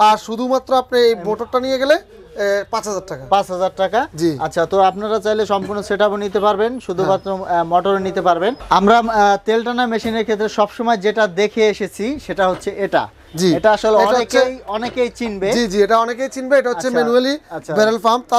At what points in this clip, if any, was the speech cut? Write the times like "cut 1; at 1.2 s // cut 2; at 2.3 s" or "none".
none